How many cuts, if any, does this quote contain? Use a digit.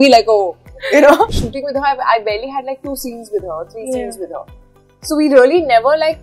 1